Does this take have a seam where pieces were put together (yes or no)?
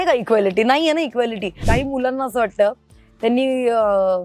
yes